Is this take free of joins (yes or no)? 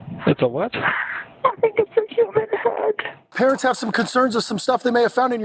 no